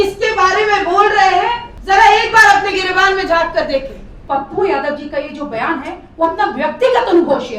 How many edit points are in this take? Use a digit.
2